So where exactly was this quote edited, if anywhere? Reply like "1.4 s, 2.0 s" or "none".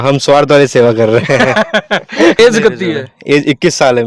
2.4 s